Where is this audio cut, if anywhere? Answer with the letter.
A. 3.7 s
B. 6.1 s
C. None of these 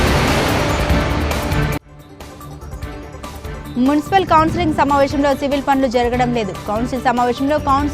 A